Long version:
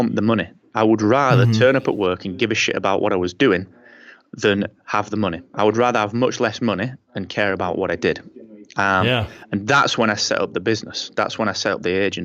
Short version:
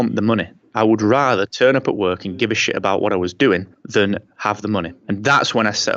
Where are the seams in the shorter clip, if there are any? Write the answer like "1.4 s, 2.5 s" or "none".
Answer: 3.8 s, 4.9 s